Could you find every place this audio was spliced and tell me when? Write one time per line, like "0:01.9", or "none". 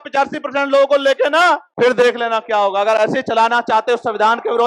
0:01.7